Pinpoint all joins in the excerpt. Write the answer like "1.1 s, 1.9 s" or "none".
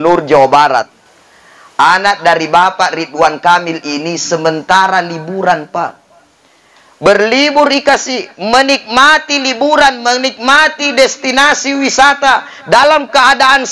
1.0 s